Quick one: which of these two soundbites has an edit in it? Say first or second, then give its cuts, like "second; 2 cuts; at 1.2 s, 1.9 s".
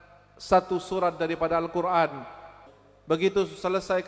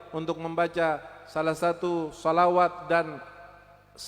first; 1 cut; at 2.6 s